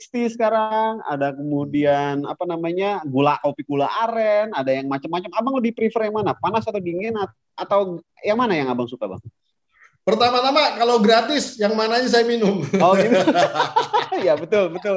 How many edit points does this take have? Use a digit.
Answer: 0